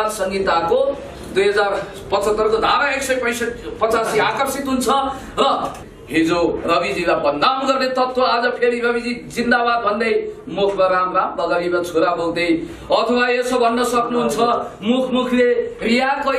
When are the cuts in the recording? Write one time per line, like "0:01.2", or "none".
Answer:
0:05.7